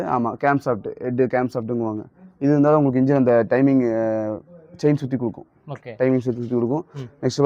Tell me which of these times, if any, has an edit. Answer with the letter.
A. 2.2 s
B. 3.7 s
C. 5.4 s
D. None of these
D